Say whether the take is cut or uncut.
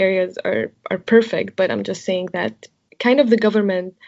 cut